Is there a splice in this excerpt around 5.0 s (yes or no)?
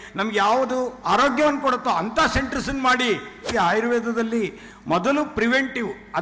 no